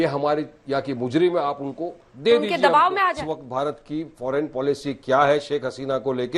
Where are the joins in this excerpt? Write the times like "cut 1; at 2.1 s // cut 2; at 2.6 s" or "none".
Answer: cut 1; at 3.2 s

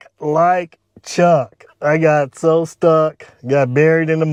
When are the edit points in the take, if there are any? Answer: none

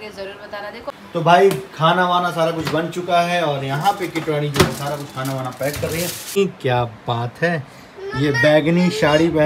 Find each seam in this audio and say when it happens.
cut 1; at 0.9 s // cut 2; at 6.4 s

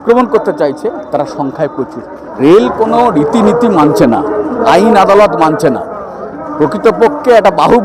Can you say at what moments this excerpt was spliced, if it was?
cut 1; at 2.4 s

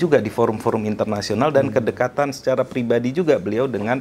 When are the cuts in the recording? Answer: none

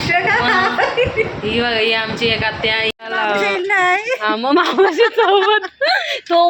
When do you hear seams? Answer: cut 1; at 2.9 s

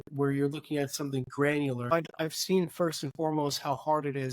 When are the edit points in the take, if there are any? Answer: cut 1; at 1.9 s

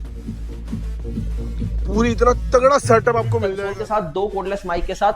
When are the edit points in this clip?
cut 1; at 3.5 s

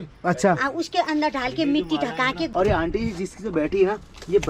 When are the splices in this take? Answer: cut 1; at 2.5 s

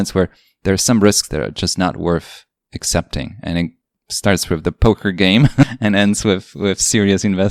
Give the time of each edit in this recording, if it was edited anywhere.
none

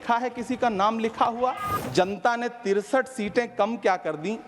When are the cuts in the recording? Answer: cut 1; at 1.7 s

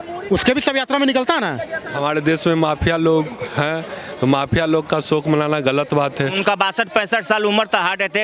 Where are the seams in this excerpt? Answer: cut 1; at 1.8 s // cut 2; at 6.4 s

